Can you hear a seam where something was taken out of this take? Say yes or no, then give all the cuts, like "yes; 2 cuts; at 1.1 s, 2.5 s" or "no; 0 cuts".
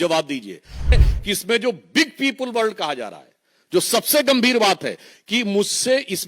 yes; 1 cut; at 1.0 s